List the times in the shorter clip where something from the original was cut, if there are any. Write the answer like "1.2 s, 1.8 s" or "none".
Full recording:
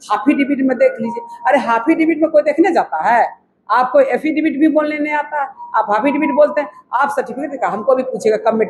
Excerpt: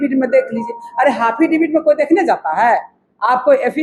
none